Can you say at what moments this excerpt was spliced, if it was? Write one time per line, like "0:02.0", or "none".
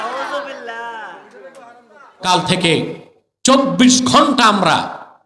0:02.2

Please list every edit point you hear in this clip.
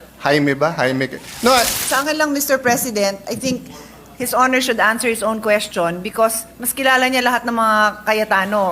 0:01.8

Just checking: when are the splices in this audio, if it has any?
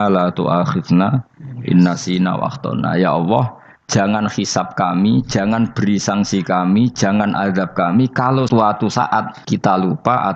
0:08.5
0:09.4

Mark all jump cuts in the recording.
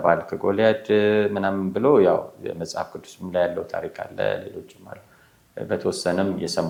none

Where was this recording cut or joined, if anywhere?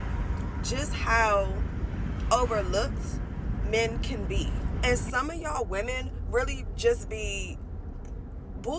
0:04.7

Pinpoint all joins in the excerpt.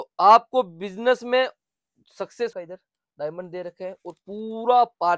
0:02.5

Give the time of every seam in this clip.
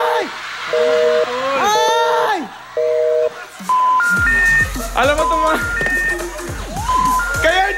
none

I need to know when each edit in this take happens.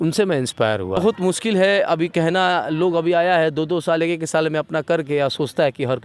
0:01.0

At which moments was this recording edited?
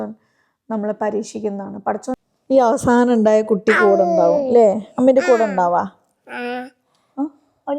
0:02.1

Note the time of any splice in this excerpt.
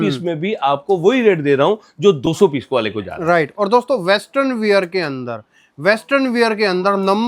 none

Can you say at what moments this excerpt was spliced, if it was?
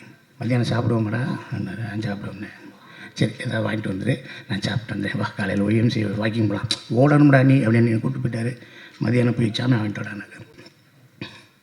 0:10.5

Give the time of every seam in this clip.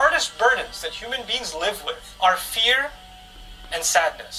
0:02.1

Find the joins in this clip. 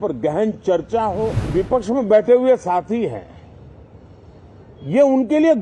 0:01.4

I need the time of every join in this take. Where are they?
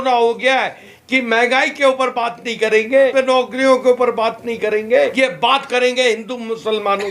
0:00.9
0:03.1
0:05.1

